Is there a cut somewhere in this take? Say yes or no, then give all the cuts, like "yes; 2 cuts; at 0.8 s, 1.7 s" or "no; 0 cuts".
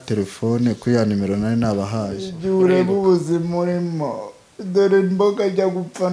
yes; 1 cut; at 2.3 s